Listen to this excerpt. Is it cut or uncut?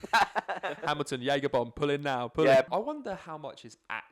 cut